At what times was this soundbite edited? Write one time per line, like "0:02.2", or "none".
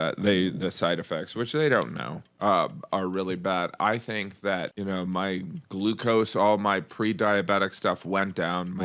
0:04.7